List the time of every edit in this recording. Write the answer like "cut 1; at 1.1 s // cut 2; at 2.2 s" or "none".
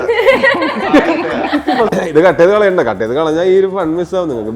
cut 1; at 1.9 s